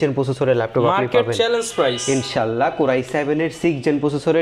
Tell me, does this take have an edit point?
no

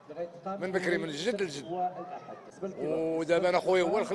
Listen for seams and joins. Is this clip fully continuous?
yes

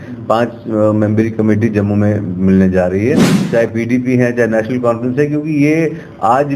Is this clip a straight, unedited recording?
no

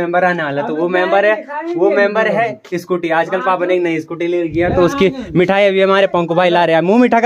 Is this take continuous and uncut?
yes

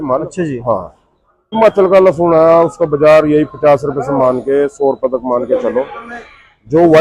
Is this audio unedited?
no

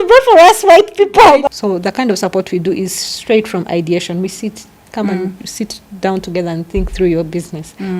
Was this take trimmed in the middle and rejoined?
yes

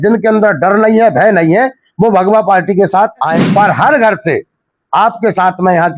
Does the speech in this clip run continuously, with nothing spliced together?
no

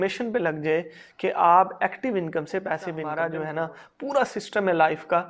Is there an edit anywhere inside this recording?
yes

